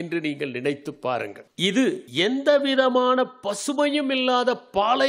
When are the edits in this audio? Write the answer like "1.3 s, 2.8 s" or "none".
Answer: 1.4 s, 2.0 s